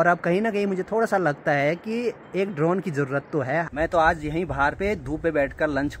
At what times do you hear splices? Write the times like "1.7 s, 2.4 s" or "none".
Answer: 3.7 s